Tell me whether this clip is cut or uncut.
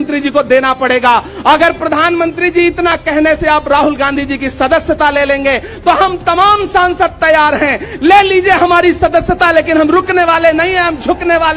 uncut